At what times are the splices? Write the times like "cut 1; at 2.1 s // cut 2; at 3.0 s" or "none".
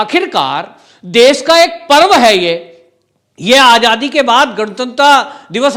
none